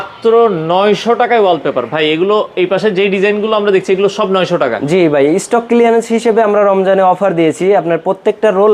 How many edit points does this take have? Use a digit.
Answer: 0